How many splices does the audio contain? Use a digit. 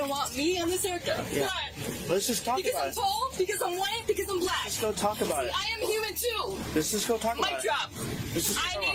0